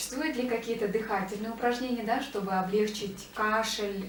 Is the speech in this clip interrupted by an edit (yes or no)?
no